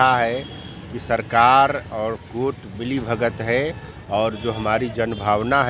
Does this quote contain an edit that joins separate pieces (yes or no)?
no